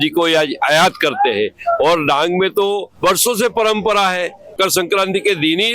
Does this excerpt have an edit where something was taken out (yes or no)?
no